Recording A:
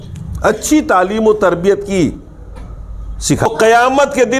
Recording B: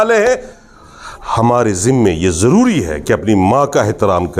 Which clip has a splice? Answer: A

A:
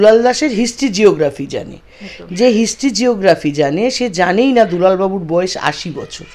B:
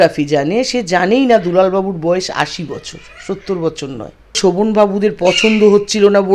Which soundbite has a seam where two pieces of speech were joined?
B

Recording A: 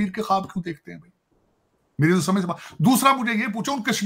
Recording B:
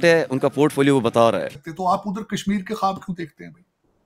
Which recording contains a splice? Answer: B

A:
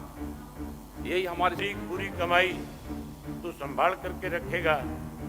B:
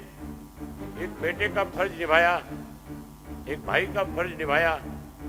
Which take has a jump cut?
A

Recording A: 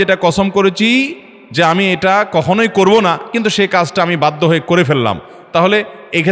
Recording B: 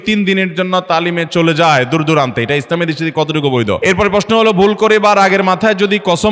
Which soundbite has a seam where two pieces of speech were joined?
B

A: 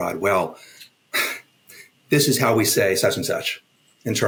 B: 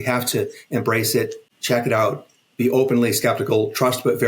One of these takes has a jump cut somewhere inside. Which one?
B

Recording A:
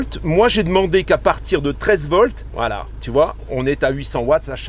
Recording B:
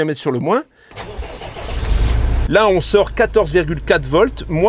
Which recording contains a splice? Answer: B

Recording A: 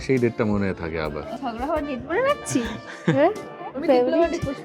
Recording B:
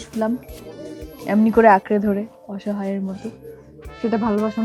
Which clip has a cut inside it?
A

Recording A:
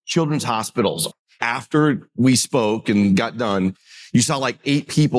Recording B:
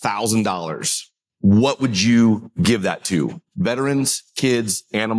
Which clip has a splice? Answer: A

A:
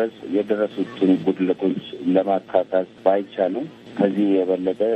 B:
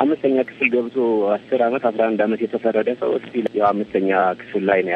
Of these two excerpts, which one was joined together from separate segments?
B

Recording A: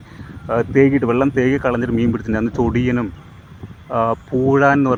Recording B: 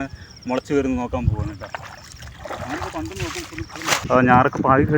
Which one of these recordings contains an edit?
B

